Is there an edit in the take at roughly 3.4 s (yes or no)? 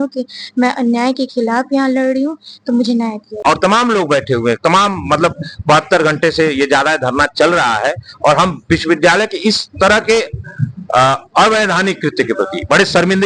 yes